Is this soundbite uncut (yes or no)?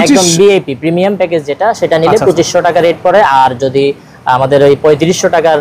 yes